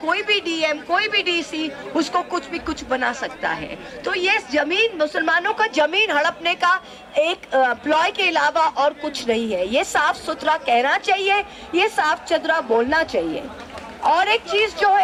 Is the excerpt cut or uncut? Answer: uncut